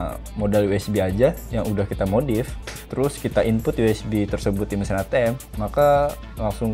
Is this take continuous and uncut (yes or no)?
yes